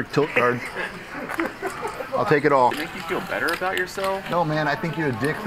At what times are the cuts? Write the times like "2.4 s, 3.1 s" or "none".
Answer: 2.8 s